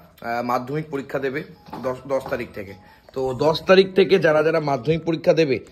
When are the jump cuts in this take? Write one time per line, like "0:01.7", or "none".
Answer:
none